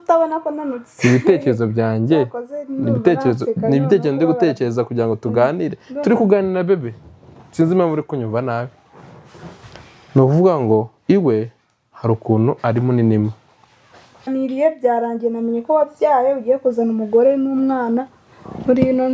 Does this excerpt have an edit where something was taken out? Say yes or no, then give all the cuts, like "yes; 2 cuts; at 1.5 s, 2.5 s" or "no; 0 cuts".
yes; 1 cut; at 14.3 s